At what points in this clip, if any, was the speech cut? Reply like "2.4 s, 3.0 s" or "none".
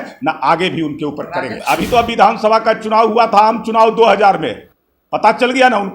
1.6 s